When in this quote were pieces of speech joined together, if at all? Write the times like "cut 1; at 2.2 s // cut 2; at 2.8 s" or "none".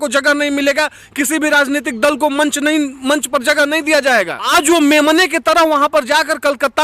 cut 1; at 4.4 s

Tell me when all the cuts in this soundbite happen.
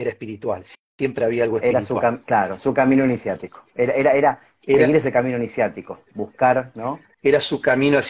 cut 1; at 7.1 s

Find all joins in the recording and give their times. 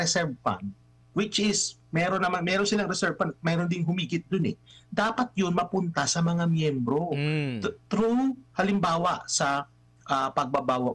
none

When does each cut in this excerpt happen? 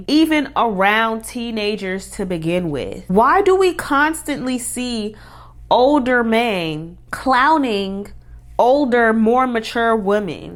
none

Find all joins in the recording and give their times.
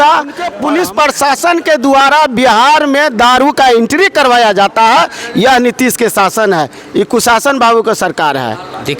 cut 1; at 0.9 s

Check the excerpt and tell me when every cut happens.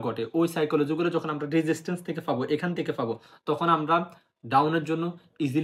none

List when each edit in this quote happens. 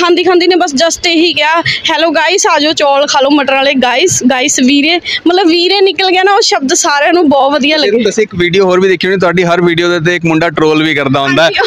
none

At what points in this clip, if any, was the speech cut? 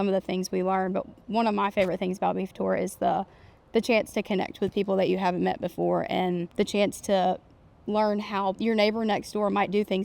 cut 1; at 6.5 s // cut 2; at 8.6 s

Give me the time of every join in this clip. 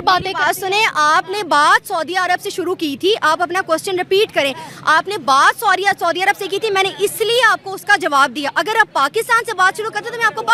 none

